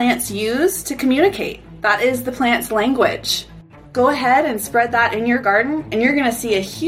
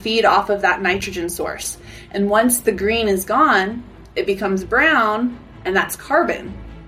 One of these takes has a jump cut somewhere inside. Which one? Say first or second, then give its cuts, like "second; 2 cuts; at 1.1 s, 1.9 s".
first; 1 cut; at 3.8 s